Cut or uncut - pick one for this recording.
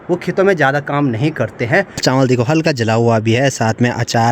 cut